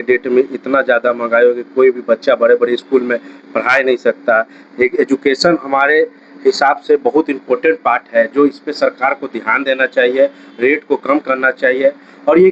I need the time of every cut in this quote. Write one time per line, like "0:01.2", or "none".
none